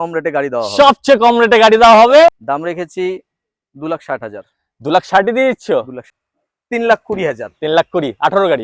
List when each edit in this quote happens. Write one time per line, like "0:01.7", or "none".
0:02.4
0:06.0